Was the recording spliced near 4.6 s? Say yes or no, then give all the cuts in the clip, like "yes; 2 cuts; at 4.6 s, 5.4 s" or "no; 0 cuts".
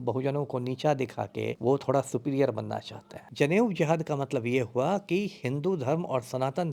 no; 2 cuts; at 1.5 s, 3.2 s